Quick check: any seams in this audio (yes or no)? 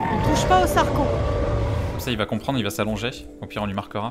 yes